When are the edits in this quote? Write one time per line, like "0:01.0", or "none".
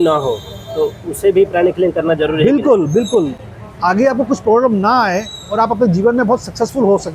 none